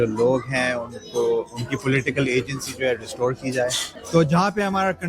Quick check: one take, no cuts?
no; 1 cut; at 3.9 s

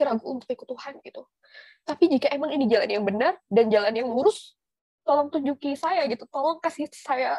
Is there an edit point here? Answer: no; 0 cuts

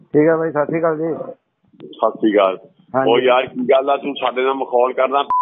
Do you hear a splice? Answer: no; 0 cuts

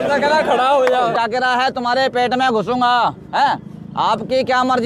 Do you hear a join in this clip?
yes; 1 cut; at 1.1 s

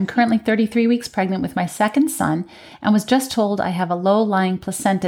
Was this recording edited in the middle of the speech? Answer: no; 0 cuts

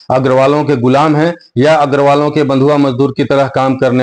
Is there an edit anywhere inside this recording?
no; 0 cuts

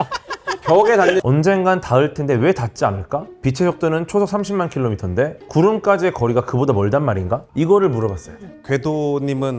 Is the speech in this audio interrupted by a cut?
yes; 2 cuts; at 1.2 s, 7.5 s

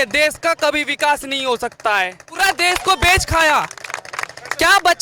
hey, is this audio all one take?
no; 1 cut; at 2.4 s

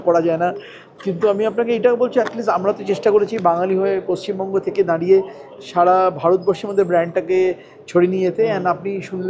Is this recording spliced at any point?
no; 0 cuts

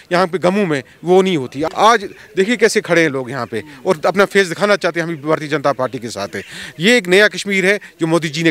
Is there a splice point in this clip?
yes; 1 cut; at 1.6 s

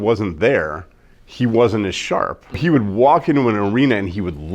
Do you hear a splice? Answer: yes; 1 cut; at 2.6 s

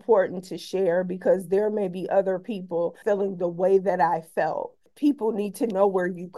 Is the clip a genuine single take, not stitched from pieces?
no; 2 cuts; at 3.0 s, 4.9 s

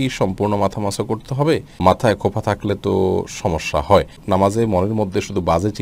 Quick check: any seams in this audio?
yes; 2 cuts; at 1.7 s, 4.2 s

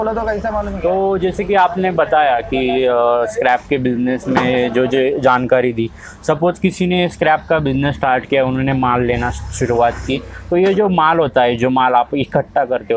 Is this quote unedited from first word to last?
no; 1 cut; at 1.2 s

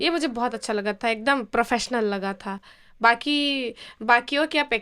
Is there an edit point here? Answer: no; 0 cuts

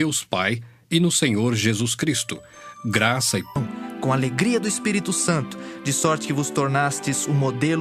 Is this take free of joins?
yes; 0 cuts

